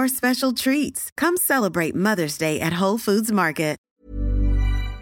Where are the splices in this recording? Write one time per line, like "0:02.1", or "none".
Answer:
0:03.9